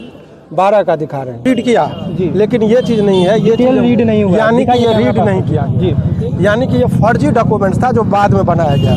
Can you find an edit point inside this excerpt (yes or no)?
yes